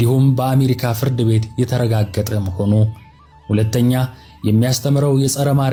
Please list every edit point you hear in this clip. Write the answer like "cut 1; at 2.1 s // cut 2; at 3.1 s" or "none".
none